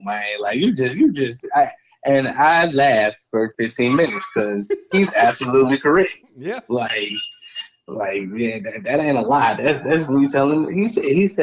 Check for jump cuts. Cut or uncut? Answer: uncut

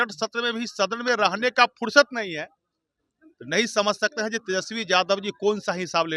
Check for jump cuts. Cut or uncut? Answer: uncut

